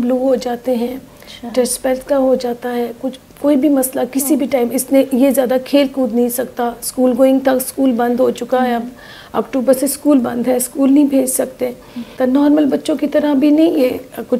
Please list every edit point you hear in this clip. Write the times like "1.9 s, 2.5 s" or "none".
12.1 s